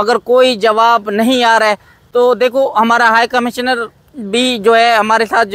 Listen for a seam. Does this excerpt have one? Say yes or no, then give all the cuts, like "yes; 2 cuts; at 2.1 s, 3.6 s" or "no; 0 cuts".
no; 0 cuts